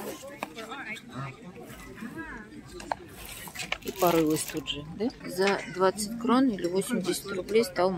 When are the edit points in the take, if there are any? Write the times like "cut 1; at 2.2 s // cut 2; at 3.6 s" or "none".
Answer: cut 1; at 5.2 s